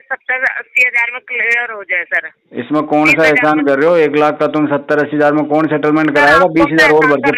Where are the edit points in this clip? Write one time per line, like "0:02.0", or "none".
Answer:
none